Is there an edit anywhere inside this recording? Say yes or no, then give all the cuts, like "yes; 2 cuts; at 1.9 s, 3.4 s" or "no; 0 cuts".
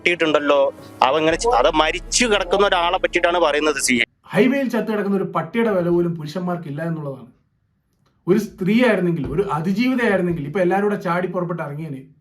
yes; 1 cut; at 4.2 s